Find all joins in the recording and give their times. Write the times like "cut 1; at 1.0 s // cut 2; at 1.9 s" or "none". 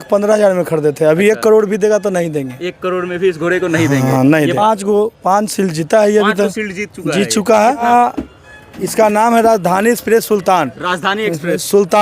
cut 1; at 4.5 s // cut 2; at 7.8 s

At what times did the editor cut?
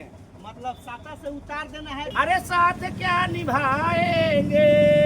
cut 1; at 2.1 s

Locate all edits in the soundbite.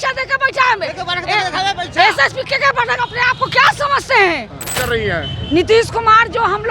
cut 1; at 4.8 s

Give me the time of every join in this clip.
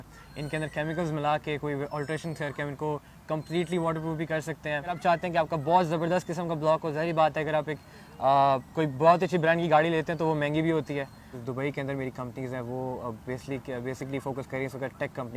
cut 1; at 5.0 s // cut 2; at 11.4 s

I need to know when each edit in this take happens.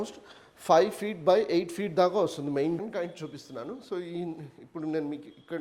cut 1; at 2.8 s

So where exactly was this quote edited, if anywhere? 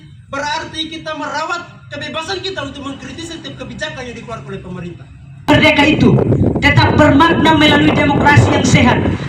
cut 1; at 5.5 s

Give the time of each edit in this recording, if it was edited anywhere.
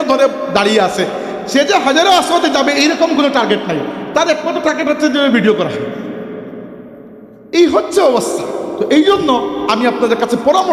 cut 1; at 8.7 s

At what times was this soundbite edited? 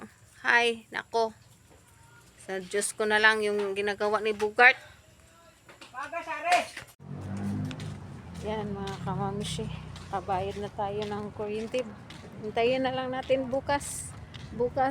cut 1; at 6.8 s

